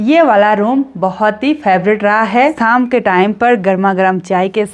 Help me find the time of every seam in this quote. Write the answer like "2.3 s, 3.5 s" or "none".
2.6 s

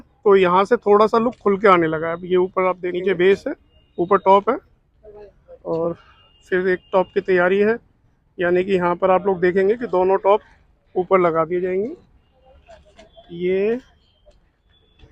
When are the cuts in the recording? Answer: none

